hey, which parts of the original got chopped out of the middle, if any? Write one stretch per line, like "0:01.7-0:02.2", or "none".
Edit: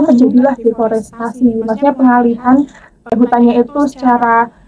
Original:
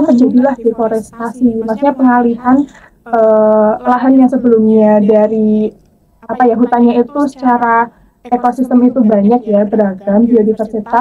0:03.1-0:06.5